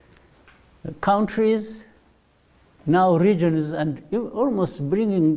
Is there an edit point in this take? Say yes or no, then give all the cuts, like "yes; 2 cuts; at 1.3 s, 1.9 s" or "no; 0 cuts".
no; 0 cuts